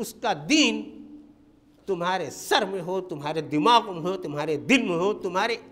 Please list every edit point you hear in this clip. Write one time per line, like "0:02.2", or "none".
none